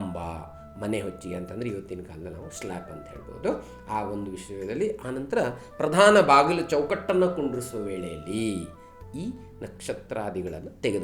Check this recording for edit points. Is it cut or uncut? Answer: uncut